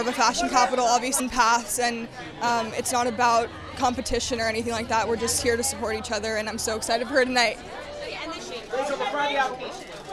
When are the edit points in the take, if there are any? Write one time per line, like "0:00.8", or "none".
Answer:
none